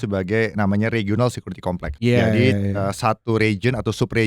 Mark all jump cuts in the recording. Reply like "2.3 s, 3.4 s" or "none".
1.9 s